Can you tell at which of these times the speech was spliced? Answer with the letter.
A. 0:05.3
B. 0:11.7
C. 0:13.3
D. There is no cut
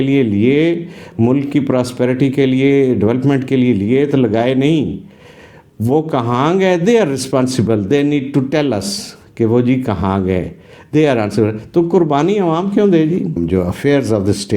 C